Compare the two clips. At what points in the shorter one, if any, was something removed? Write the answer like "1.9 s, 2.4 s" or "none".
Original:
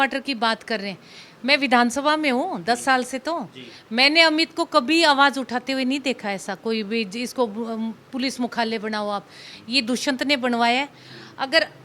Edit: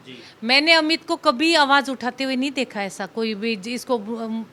none